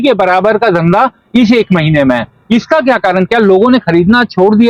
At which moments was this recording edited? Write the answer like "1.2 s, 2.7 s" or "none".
none